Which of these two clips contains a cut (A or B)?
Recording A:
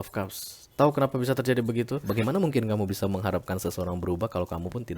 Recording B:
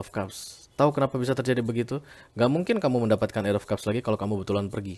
A